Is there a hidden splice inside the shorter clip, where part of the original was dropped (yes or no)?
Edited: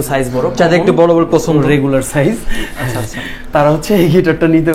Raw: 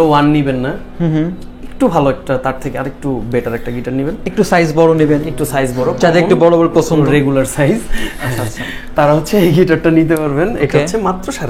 no